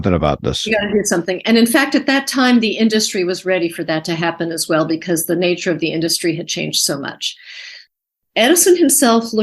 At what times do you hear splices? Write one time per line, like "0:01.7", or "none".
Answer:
0:08.0